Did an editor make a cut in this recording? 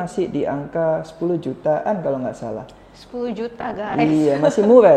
no; 0 cuts

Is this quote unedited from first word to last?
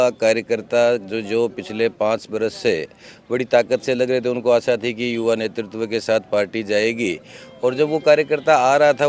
yes; 0 cuts

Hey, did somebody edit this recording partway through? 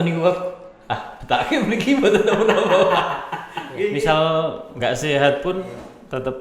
yes; 1 cut; at 3.9 s

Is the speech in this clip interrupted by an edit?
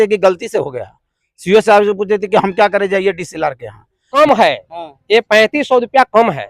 yes; 1 cut; at 4.1 s

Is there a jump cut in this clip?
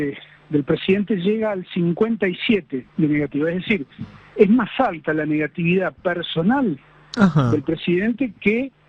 no; 0 cuts

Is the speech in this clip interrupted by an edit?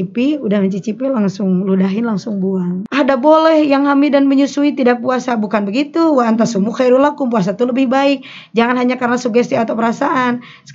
yes; 1 cut; at 2.8 s

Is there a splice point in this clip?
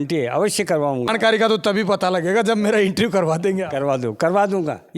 yes; 1 cut; at 1.1 s

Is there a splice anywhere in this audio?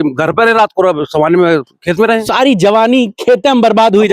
yes; 1 cut; at 2.3 s

